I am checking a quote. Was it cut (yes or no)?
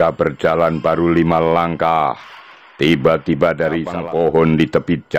yes